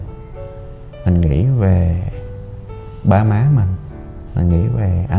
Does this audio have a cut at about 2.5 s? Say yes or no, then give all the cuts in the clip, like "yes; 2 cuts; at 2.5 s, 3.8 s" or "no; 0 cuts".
no; 0 cuts